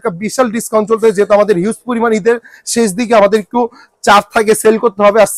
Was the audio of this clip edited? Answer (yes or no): no